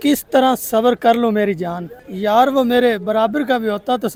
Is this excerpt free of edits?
yes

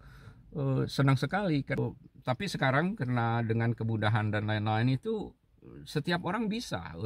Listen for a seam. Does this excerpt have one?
yes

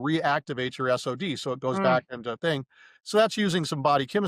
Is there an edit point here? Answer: no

